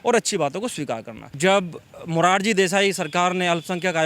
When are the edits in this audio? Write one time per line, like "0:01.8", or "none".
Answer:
0:01.2